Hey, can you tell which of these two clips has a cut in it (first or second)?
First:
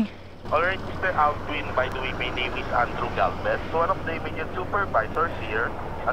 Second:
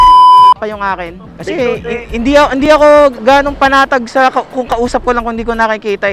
second